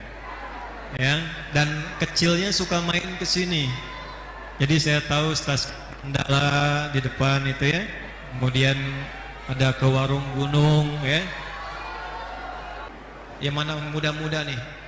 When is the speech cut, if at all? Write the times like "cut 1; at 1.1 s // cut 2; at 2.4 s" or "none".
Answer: cut 1; at 12.9 s